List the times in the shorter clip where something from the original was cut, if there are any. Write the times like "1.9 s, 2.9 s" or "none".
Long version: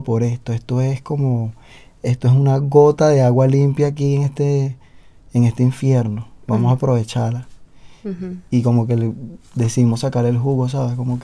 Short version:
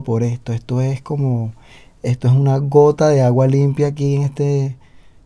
none